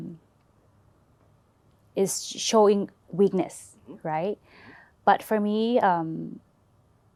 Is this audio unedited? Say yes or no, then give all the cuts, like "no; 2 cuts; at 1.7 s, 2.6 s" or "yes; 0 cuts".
yes; 0 cuts